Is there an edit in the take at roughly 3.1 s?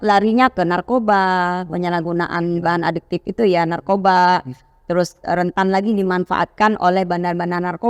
no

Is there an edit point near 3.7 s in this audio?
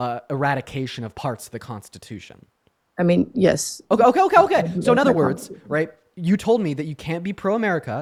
no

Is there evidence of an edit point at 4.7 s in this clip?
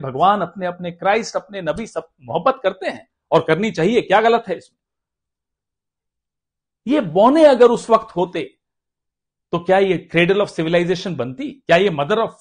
no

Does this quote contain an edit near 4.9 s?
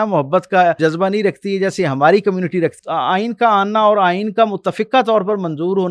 no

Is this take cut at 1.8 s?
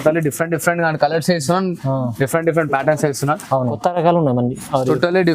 no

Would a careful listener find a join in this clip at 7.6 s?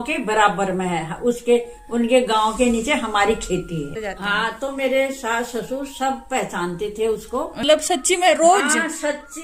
yes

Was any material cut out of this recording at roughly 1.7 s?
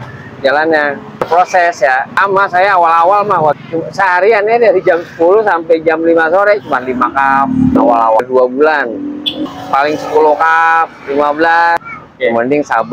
no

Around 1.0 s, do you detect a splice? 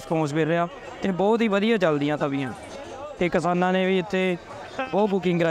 no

